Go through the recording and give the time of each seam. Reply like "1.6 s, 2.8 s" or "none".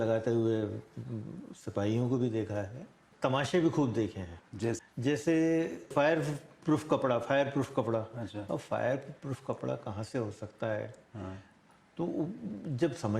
3.0 s, 4.8 s